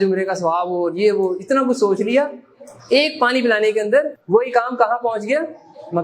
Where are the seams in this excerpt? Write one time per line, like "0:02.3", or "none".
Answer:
0:04.2